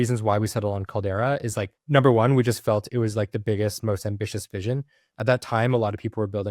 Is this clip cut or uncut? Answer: uncut